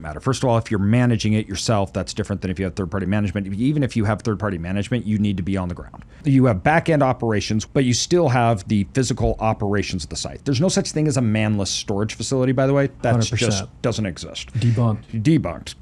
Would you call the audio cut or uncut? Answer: cut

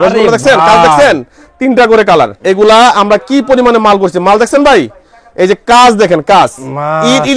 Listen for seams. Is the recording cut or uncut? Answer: cut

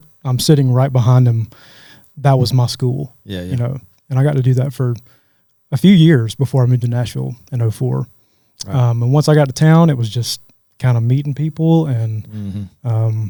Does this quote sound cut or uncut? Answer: uncut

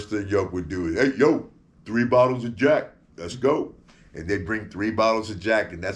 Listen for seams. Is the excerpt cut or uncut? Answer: uncut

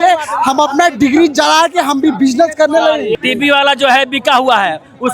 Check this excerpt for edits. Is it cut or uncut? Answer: cut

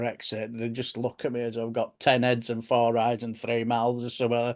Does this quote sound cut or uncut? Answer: uncut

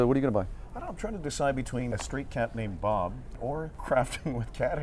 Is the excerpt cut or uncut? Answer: cut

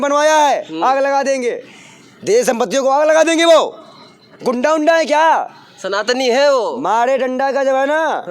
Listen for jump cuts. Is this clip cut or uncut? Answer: uncut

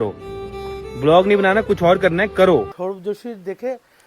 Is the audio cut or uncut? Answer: cut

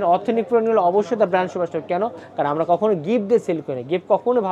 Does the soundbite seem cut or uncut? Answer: uncut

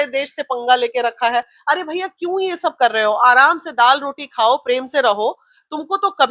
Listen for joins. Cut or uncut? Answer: uncut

